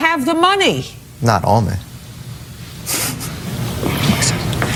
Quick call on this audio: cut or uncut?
uncut